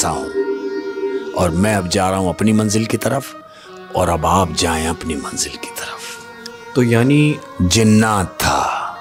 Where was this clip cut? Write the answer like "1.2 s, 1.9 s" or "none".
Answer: none